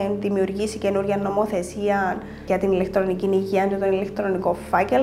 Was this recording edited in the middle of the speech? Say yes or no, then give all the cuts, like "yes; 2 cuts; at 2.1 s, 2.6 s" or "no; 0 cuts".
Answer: yes; 1 cut; at 2.4 s